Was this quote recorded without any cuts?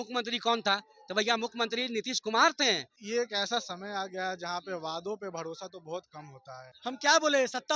no; 2 cuts; at 2.9 s, 6.7 s

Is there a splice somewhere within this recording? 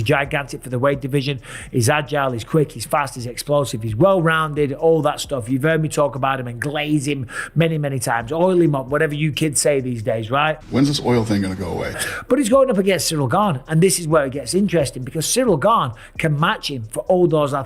no; 0 cuts

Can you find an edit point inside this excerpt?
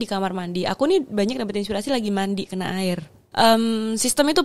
yes; 1 cut; at 3.2 s

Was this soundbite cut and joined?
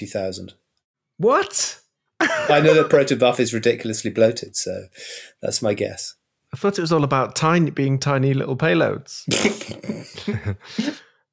no; 0 cuts

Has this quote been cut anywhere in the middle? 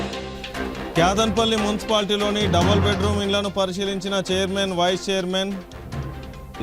yes; 1 cut; at 1.0 s

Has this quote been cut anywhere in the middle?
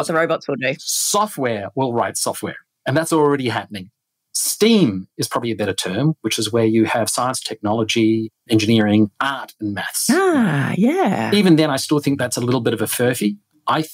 yes; 2 cuts; at 4.1 s, 11.2 s

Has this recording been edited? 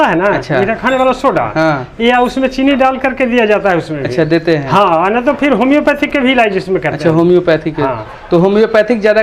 no; 0 cuts

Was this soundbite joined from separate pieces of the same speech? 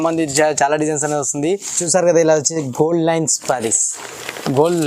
yes; 1 cut; at 1.8 s

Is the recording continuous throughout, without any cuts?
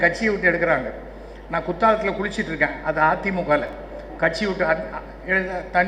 yes; 0 cuts

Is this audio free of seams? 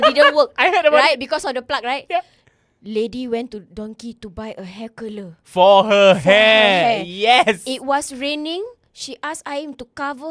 yes; 0 cuts

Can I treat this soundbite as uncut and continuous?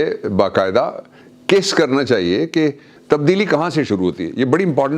no; 1 cut; at 3.0 s

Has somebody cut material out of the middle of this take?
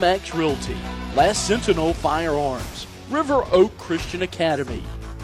no; 0 cuts

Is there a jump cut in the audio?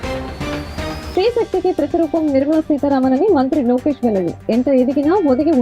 yes; 1 cut; at 1.1 s

